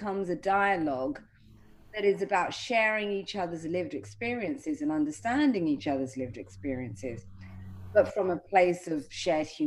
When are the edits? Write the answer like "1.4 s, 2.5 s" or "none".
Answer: none